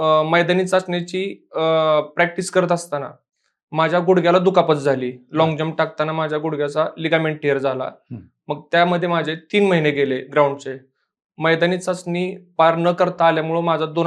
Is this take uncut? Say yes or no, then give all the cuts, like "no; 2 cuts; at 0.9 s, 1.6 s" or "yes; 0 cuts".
yes; 0 cuts